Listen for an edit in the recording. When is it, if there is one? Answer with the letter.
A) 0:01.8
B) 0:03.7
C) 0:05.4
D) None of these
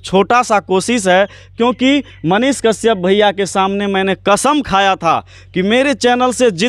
D